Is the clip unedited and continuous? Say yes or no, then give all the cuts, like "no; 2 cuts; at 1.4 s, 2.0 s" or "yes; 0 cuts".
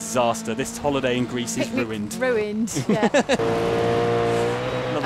no; 1 cut; at 3.5 s